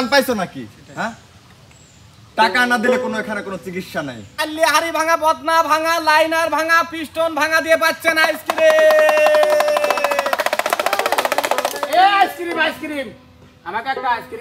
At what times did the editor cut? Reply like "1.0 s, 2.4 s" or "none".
4.4 s